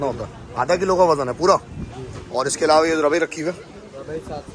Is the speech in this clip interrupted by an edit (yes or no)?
no